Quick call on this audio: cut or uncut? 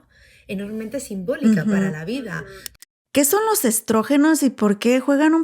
cut